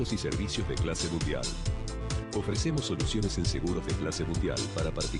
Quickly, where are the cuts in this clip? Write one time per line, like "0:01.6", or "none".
none